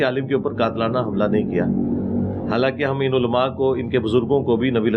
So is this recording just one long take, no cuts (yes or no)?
yes